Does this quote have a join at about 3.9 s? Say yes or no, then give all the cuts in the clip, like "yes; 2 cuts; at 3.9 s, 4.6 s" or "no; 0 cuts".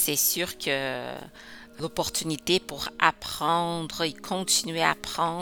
no; 1 cut; at 1.8 s